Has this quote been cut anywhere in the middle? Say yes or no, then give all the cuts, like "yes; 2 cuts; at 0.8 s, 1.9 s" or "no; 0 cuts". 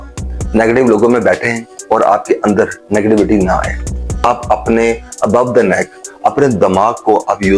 yes; 1 cut; at 4.3 s